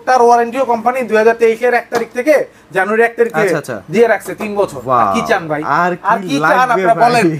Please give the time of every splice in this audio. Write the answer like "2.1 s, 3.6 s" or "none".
none